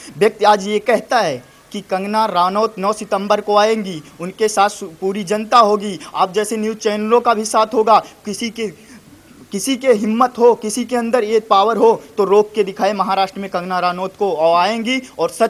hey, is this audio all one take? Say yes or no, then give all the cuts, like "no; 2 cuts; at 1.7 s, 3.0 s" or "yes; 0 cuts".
yes; 0 cuts